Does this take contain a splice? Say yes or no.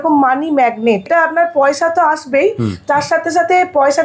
yes